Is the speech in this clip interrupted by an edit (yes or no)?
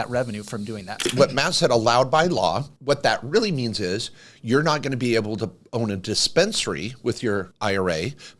yes